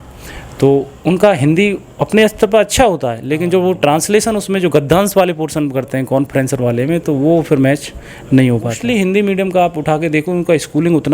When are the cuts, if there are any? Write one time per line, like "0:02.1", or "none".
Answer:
0:08.8

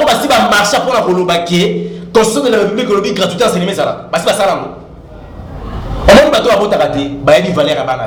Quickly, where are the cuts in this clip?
none

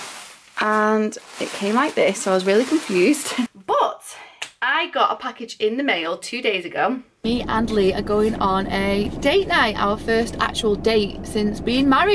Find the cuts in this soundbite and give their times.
0:03.6
0:07.1

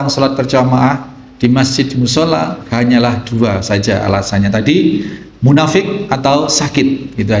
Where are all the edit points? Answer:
0:02.6

